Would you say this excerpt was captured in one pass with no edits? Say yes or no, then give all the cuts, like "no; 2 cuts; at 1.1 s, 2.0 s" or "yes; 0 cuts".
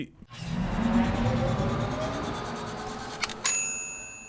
yes; 0 cuts